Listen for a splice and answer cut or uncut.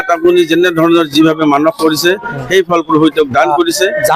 uncut